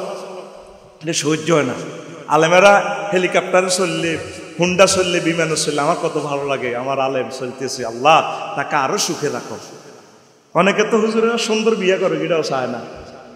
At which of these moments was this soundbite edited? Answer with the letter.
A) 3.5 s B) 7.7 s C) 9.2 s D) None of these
D